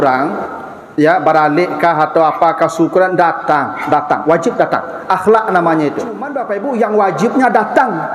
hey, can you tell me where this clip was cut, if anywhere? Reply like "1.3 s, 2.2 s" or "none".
6.4 s

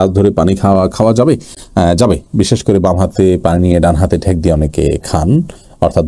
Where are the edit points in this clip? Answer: none

